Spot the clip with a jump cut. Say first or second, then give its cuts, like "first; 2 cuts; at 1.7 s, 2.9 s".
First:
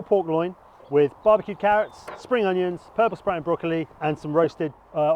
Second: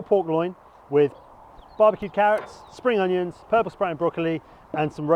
first; 2 cuts; at 1.2 s, 3.9 s